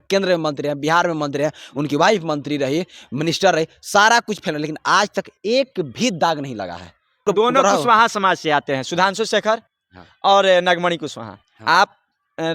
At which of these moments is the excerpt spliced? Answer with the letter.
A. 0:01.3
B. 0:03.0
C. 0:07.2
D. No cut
C